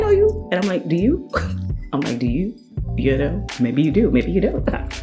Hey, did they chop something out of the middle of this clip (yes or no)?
no